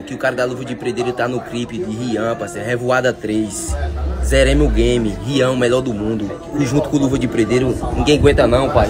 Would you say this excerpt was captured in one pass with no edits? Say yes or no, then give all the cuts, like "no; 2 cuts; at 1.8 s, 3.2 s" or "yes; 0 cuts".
yes; 0 cuts